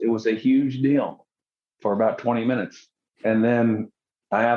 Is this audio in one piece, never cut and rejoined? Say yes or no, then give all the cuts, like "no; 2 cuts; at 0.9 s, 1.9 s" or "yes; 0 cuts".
yes; 0 cuts